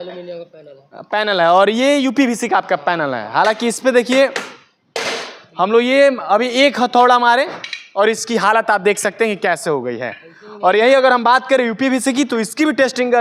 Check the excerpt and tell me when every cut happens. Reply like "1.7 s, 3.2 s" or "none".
none